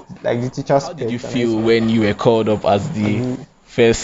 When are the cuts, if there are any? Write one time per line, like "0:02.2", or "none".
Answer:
0:01.2